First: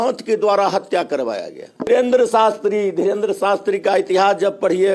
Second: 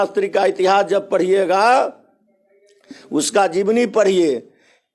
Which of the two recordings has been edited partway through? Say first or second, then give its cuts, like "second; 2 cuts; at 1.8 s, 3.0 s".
first; 1 cut; at 1.9 s